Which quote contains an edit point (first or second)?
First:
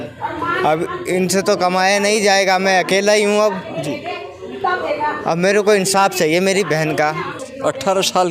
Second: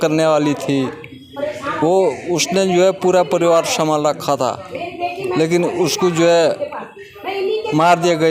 first